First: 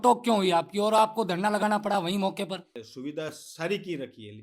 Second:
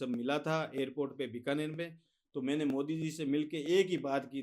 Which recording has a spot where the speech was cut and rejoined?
first; 1 cut; at 2.8 s

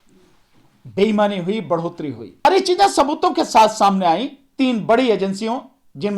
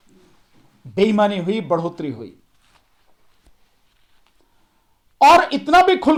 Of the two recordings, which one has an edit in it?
first; 1 cut; at 2.5 s

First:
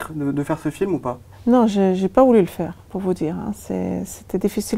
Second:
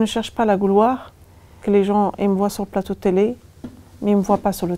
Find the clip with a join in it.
second; 1 cut; at 1.5 s

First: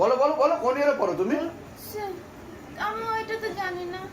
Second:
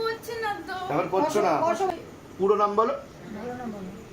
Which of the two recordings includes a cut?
second; 1 cut; at 1.9 s

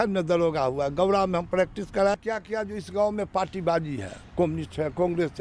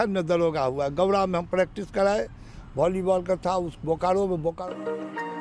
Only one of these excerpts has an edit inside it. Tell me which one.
first; 1 cut; at 2.2 s

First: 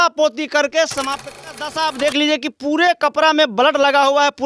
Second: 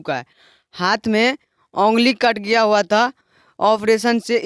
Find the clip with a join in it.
first; 1 cut; at 1.4 s

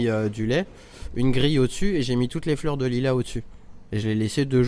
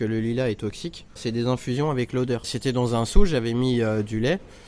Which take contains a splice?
second; 1 cut; at 1.2 s

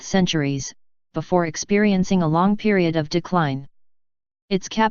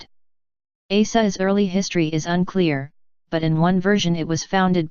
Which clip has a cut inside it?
second; 1 cut; at 1.4 s

